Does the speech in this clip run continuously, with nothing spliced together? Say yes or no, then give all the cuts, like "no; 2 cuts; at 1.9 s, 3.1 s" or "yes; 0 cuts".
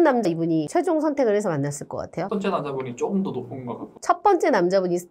no; 1 cut; at 2.3 s